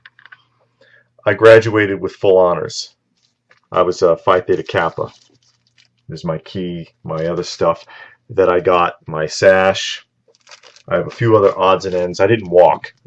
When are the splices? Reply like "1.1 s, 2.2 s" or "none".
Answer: 1.9 s